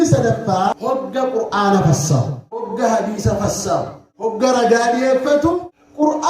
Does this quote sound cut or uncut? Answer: cut